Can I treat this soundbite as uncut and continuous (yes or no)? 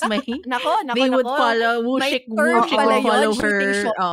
yes